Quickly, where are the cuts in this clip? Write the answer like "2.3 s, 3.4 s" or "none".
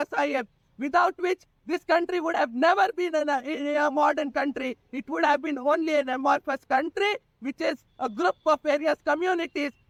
none